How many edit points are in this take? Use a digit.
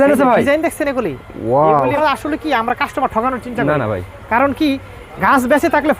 1